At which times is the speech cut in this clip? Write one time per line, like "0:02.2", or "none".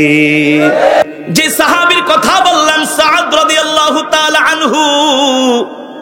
0:01.0